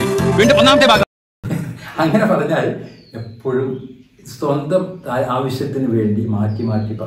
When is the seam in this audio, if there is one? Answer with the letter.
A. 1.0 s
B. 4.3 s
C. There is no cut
A